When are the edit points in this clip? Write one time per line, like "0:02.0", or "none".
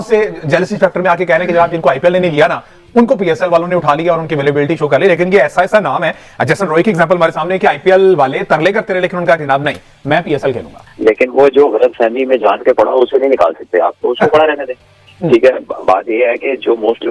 0:10.8